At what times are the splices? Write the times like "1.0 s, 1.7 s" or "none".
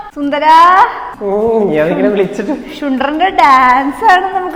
none

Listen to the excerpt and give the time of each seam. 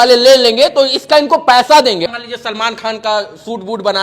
2.0 s

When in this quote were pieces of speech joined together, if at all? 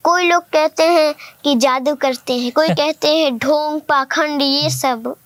none

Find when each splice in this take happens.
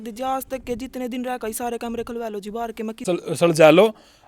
3.0 s

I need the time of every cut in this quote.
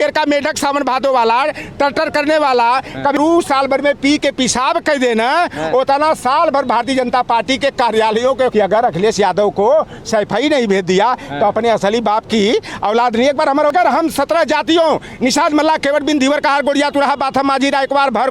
3.2 s, 8.5 s, 13.7 s

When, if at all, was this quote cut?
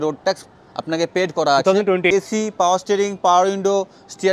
2.1 s

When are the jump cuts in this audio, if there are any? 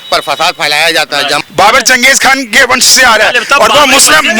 1.4 s

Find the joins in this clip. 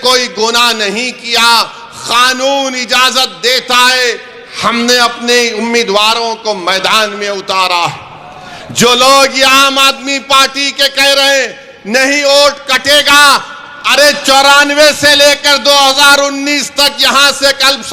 none

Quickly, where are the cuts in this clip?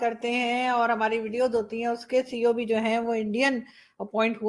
none

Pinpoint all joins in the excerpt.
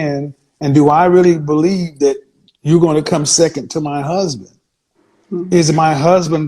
1.2 s

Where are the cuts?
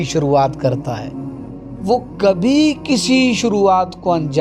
none

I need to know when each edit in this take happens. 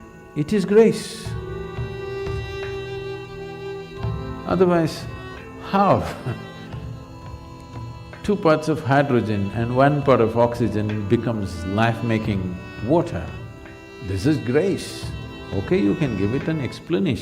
9.1 s

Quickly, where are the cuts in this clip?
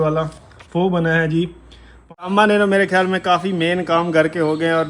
2.2 s

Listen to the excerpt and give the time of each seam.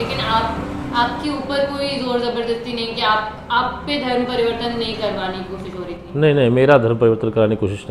none

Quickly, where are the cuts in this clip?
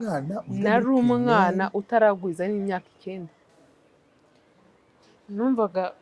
3.4 s

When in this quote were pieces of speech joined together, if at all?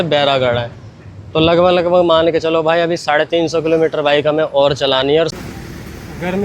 5.4 s

